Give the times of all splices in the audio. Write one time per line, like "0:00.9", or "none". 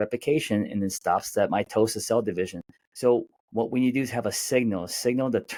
none